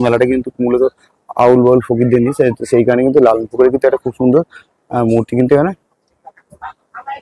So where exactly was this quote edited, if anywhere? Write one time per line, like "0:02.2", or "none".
none